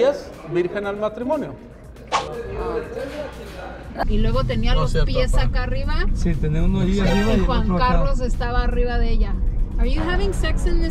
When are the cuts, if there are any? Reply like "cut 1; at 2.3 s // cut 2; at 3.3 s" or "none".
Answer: none